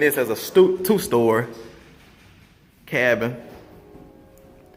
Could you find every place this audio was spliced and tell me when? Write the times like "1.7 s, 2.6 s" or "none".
none

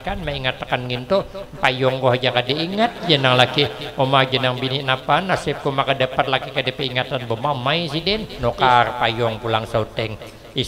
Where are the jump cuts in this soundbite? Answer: 8.3 s

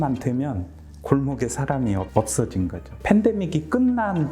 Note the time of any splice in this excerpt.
2.1 s, 2.9 s

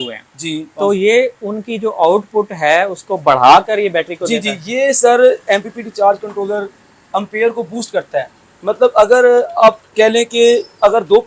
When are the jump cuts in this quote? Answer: none

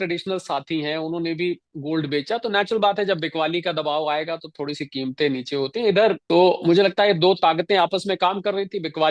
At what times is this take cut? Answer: 6.2 s

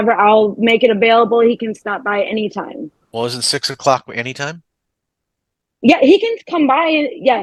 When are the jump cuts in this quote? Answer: none

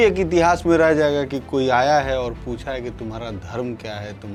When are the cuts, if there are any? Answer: none

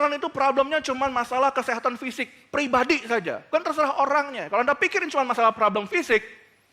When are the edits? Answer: 3.5 s

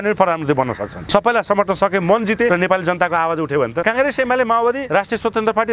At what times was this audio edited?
1.0 s, 2.5 s, 3.8 s, 4.8 s

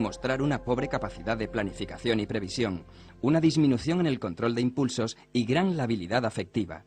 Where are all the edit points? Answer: none

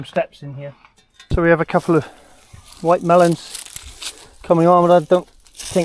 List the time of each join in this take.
1.3 s

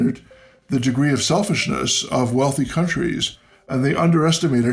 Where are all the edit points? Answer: 3.7 s

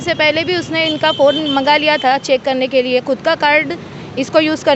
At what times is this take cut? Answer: none

